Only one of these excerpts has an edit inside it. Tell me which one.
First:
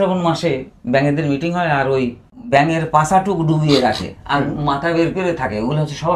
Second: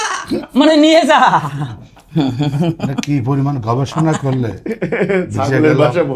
first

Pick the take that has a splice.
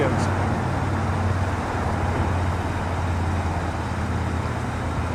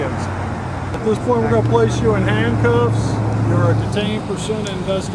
second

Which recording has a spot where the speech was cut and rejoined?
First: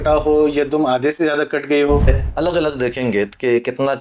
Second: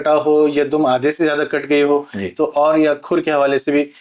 first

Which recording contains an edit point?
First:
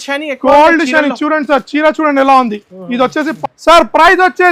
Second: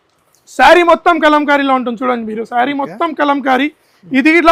first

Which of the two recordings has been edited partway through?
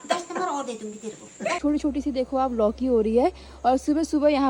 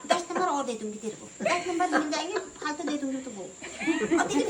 first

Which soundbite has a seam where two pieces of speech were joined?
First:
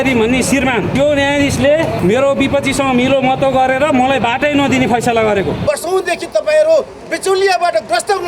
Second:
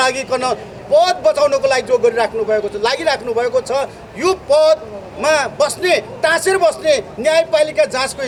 first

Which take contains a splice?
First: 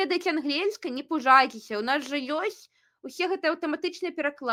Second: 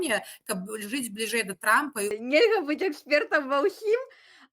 second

